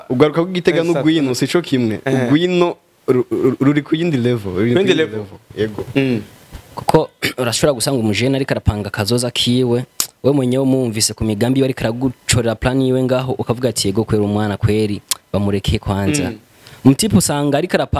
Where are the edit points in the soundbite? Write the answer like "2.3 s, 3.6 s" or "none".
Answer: 5.9 s